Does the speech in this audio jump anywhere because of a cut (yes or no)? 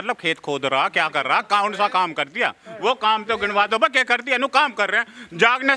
no